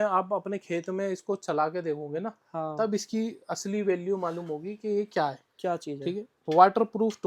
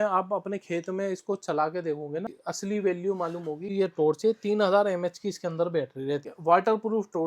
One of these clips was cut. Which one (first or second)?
second